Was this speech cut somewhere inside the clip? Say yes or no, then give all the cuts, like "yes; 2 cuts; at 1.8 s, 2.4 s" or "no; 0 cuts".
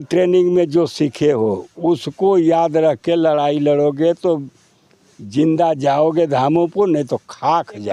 no; 0 cuts